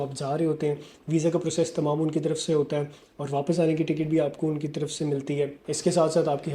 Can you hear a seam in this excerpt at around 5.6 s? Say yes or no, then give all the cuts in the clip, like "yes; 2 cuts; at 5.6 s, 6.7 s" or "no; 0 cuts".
no; 0 cuts